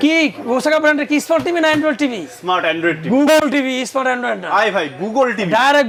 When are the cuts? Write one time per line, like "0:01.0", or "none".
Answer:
none